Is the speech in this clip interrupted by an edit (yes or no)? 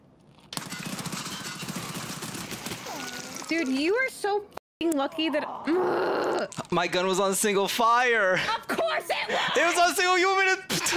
no